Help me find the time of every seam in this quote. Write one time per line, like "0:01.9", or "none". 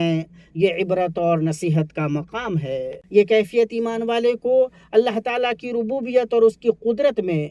0:03.0